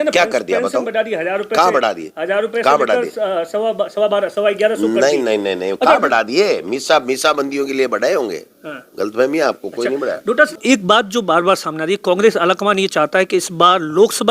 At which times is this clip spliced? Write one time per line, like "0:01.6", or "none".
0:10.6